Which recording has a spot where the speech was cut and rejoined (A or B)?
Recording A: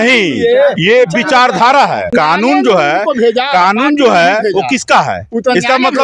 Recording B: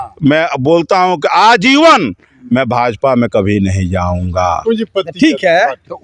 A